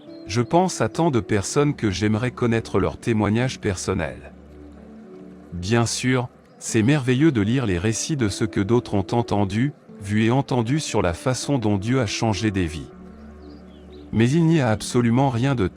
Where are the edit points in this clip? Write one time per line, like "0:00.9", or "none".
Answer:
0:04.1
0:05.5